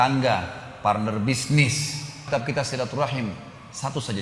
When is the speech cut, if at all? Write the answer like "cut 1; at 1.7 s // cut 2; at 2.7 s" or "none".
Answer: cut 1; at 2.2 s